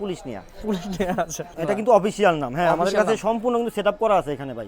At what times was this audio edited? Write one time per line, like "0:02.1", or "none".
0:01.5